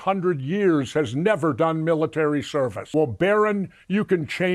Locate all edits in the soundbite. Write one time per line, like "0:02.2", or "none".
0:02.8